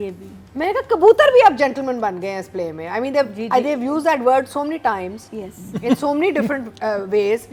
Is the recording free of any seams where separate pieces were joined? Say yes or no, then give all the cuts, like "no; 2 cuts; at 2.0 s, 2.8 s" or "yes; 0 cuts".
yes; 0 cuts